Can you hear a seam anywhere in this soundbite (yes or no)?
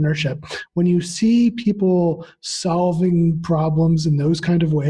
no